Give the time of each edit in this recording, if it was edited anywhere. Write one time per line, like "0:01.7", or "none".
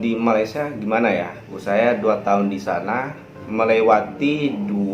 0:01.6